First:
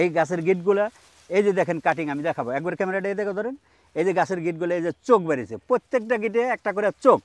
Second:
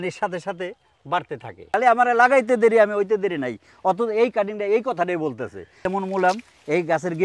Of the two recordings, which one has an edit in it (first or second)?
second